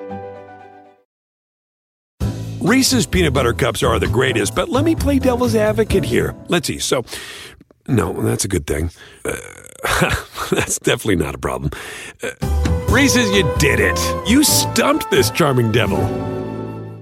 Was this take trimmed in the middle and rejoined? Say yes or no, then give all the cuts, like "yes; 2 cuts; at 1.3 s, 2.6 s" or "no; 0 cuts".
no; 0 cuts